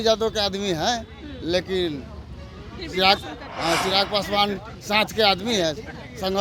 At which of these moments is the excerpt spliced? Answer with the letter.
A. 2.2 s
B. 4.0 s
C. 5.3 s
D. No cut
D